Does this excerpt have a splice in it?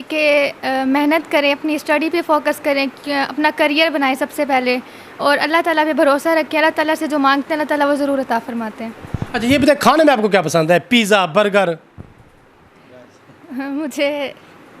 no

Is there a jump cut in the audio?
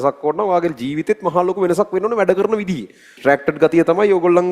yes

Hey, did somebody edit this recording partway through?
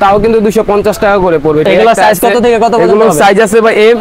yes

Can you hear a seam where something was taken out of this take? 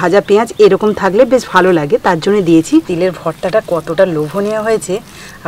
yes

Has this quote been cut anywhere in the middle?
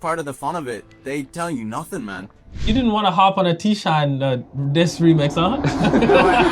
yes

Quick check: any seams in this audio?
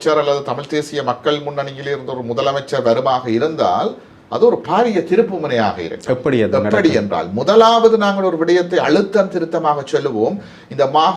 no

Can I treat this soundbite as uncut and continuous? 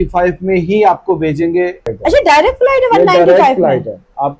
no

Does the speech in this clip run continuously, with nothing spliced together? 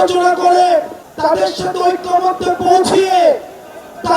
no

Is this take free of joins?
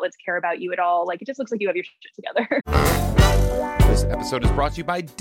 no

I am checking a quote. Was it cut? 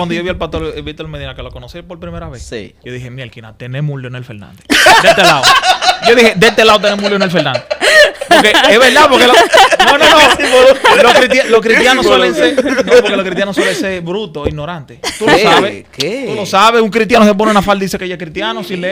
no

